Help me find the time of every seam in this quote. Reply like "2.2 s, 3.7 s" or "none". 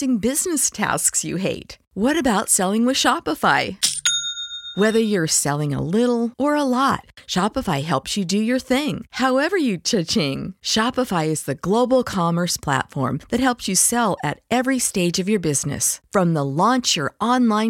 none